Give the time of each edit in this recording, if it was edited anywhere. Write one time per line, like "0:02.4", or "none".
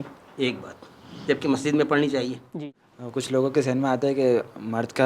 0:02.9